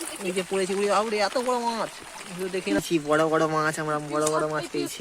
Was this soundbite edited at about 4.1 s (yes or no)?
no